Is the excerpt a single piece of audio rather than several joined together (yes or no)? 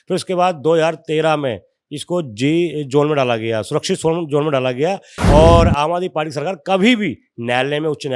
no